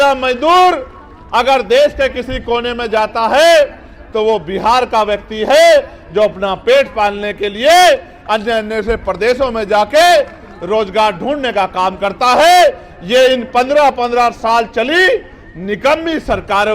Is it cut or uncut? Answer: uncut